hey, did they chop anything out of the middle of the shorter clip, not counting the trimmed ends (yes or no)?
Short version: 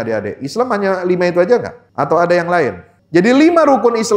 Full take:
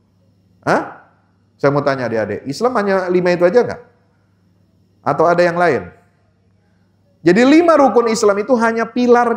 yes